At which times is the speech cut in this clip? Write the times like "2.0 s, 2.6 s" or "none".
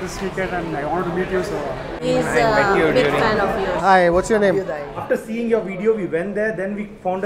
2.0 s, 4.9 s